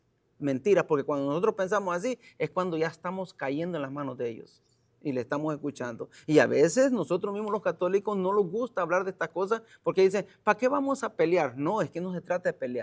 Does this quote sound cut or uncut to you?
uncut